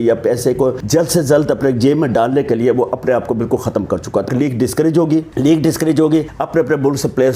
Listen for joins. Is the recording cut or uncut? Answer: cut